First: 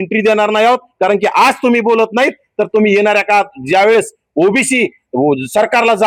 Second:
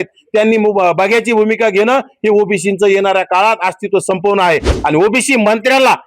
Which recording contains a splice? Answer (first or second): second